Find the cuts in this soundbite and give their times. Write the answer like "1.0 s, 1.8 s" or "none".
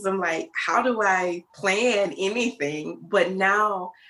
1.5 s